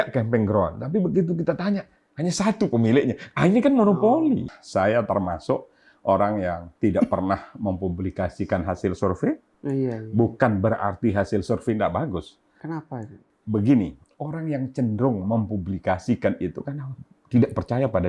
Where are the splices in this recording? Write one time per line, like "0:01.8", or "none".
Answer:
0:04.6
0:12.8